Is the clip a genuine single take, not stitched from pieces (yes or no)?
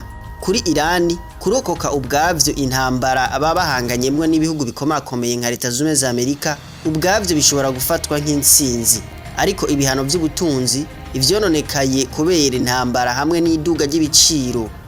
yes